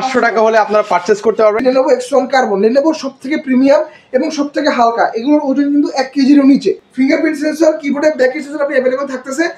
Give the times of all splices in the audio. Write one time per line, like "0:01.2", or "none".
0:01.6
0:06.9